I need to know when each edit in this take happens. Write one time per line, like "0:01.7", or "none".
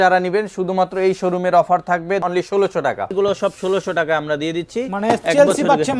0:02.2
0:03.1